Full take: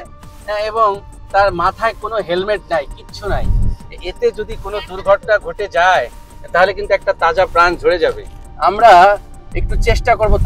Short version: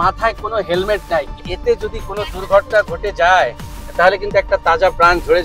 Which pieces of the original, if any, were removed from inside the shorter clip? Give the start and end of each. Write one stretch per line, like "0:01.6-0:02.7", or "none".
0:03.0-0:04.0